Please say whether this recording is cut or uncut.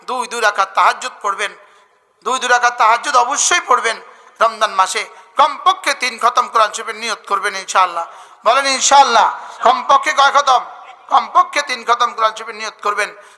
uncut